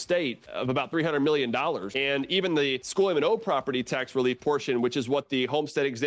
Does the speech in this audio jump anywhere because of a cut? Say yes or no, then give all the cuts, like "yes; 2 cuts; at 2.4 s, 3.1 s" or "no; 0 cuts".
yes; 2 cuts; at 1.9 s, 2.8 s